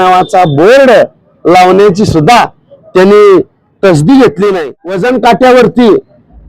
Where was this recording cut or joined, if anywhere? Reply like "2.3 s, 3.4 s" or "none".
4.9 s